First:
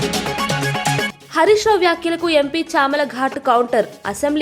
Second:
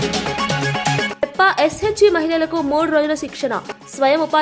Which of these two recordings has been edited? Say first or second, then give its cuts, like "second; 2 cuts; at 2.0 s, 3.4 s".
first; 1 cut; at 1.1 s